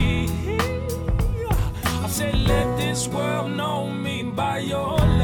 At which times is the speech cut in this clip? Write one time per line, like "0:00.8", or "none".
none